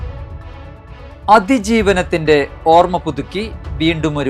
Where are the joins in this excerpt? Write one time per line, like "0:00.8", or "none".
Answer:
0:01.2